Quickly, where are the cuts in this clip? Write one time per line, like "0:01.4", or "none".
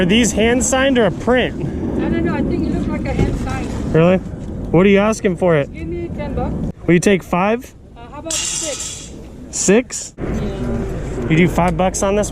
0:06.7
0:10.0

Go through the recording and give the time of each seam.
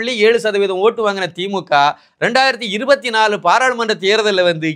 none

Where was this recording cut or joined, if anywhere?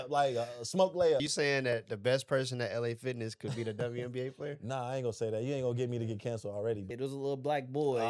0:01.3
0:06.9

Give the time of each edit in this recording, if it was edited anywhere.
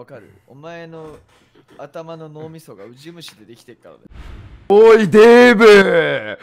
0:04.0

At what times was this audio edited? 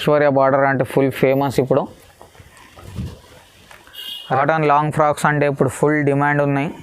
0:04.4

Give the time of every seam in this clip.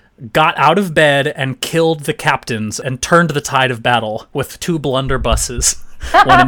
0:02.8

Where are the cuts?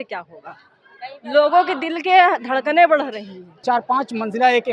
0:03.6

